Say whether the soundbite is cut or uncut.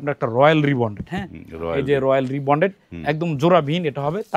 uncut